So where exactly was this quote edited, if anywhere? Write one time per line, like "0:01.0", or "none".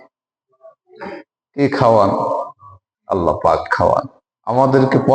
none

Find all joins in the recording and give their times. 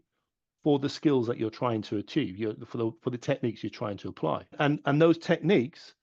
0:04.5

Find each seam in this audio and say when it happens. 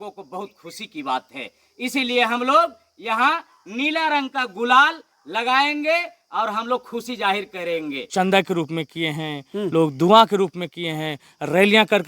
0:08.1

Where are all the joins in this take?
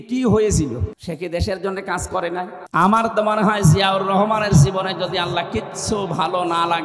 0:00.9
0:02.6

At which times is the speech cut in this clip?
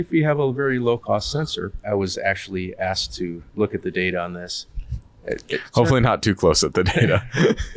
0:01.8
0:03.4

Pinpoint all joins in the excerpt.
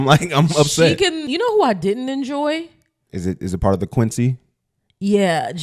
0:01.2

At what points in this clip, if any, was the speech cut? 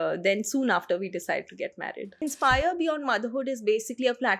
0:02.1

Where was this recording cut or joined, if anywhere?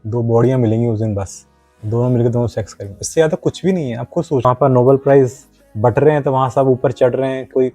0:04.4

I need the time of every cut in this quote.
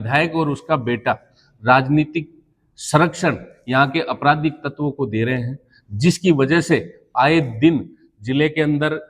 none

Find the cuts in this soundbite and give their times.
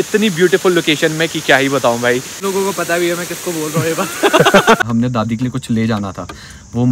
0:02.1
0:04.8

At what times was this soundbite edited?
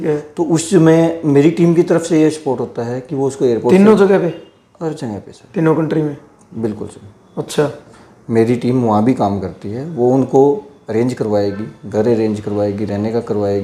none

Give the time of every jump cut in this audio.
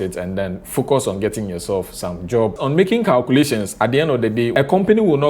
0:02.6

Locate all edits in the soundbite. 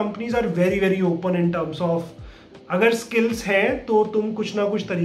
none

